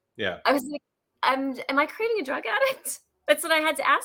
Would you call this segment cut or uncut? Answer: uncut